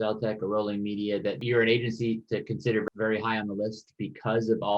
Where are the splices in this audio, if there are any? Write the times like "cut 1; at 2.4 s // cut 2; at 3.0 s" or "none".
none